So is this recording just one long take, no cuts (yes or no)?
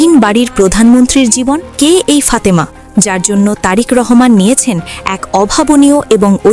no